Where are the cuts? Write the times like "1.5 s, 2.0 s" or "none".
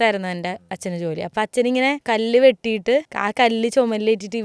1.3 s, 2.0 s, 3.2 s